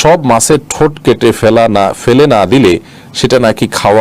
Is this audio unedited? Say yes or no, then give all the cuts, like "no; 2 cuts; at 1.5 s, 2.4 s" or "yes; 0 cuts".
yes; 0 cuts